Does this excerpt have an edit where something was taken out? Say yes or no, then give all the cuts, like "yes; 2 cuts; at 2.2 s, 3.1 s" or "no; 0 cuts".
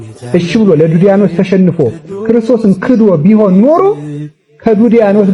no; 0 cuts